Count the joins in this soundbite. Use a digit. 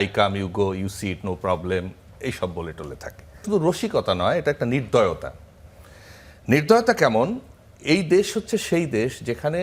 1